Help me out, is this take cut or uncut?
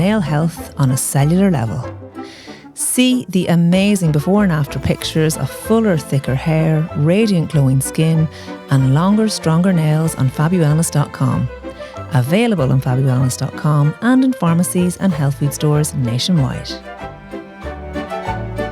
cut